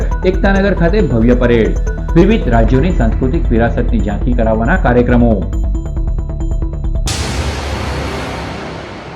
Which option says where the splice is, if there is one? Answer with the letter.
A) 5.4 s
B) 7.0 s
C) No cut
B